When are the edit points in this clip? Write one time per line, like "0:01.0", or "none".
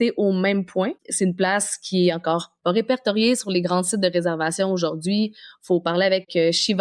none